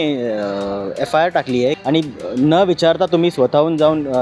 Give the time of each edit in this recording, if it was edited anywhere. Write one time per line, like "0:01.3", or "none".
0:01.8